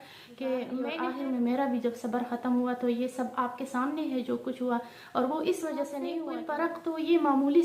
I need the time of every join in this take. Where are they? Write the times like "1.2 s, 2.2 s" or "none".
1.0 s, 6.2 s